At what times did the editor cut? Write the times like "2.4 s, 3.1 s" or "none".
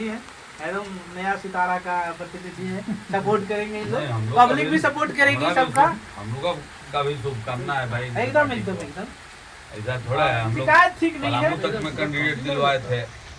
none